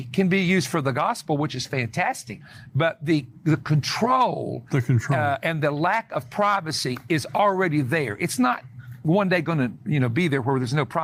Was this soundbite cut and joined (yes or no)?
no